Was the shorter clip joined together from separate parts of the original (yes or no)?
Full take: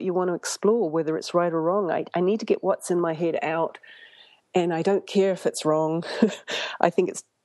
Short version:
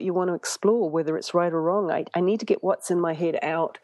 no